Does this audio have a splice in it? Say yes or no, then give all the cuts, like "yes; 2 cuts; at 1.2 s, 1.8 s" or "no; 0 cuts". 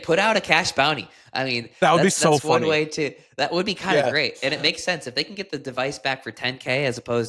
no; 0 cuts